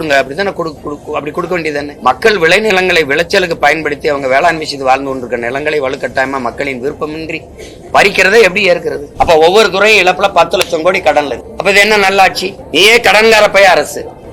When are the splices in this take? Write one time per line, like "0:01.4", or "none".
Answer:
0:01.9
0:09.0